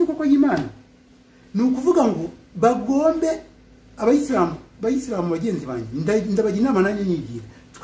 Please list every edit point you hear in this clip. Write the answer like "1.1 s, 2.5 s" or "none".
none